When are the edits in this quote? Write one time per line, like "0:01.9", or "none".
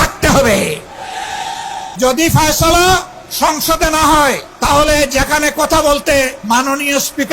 0:01.9
0:03.2
0:04.5
0:06.4